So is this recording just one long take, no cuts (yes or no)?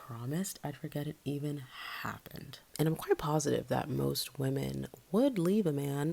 no